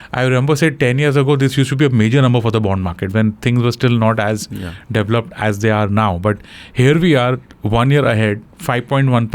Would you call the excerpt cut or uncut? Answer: uncut